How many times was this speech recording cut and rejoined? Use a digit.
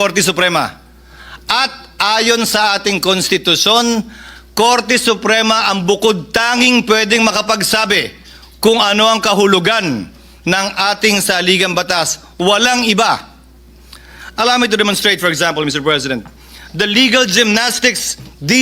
0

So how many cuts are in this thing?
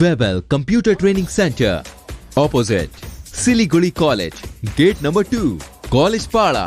0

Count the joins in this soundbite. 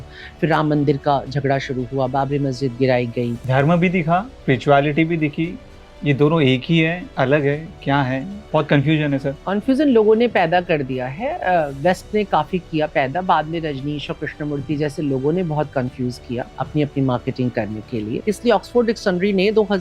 6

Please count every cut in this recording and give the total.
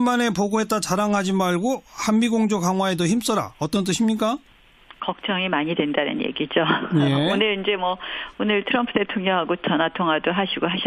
0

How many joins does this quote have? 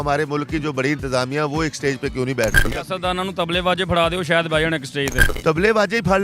2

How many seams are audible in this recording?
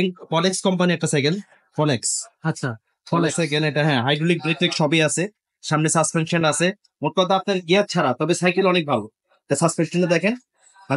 0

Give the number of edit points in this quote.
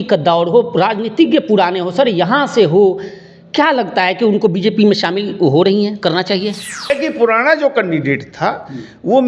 1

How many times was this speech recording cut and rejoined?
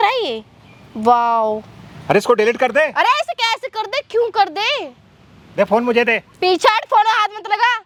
0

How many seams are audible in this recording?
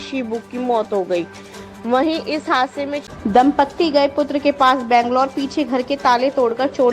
1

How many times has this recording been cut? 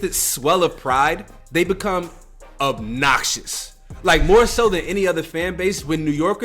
1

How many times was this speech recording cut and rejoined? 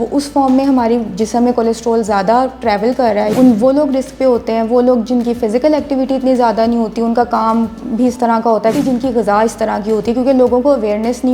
2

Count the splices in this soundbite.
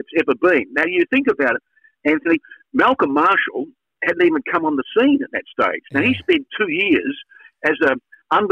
0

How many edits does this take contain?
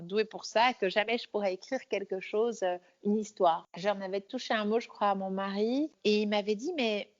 2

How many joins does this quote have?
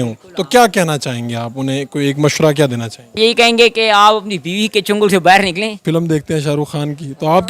2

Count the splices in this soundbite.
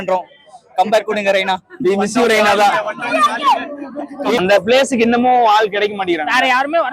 1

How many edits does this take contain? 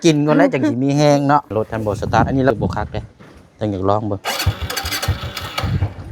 1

